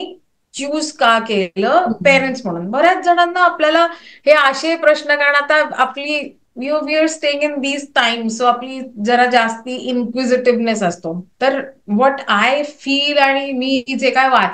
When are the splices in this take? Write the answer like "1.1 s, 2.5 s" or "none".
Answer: none